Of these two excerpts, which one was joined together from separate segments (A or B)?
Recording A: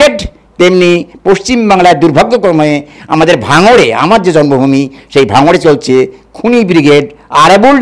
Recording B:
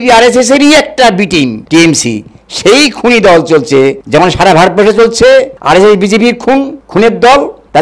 B